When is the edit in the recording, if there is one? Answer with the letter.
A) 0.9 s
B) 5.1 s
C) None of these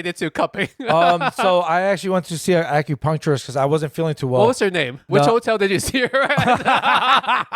B